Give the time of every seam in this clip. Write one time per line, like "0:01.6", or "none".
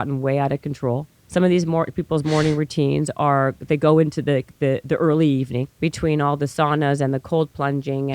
0:01.1
0:05.7